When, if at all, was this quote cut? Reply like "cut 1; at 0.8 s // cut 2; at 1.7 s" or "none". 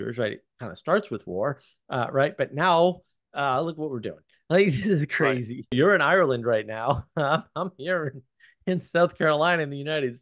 cut 1; at 5.7 s